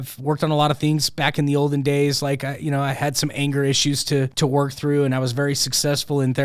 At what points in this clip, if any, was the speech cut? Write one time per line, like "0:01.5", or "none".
0:04.3